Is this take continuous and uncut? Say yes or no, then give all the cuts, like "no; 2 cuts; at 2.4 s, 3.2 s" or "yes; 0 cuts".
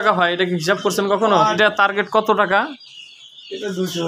no; 1 cut; at 1.6 s